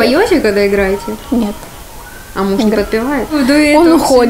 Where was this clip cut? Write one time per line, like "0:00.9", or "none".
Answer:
0:03.3